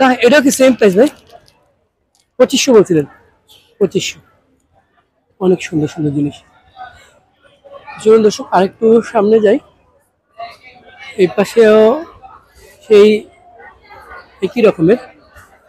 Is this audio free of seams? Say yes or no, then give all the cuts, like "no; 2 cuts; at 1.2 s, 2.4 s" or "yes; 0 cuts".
yes; 0 cuts